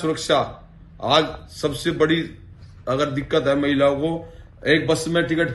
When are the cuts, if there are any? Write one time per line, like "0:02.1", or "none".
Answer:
none